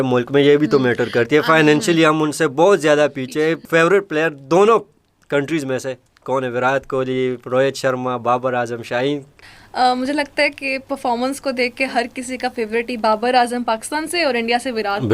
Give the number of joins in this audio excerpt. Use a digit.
2